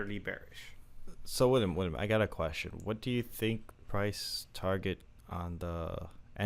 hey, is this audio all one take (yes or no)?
no